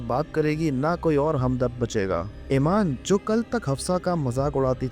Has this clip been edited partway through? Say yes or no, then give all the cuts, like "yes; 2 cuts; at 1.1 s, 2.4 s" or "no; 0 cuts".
yes; 2 cuts; at 2.3 s, 3.0 s